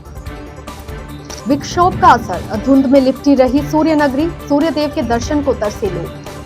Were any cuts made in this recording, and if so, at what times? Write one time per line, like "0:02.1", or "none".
0:00.9